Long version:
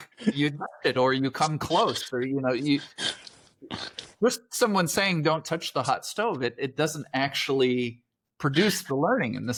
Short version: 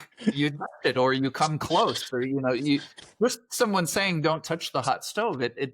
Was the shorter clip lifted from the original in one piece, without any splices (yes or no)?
no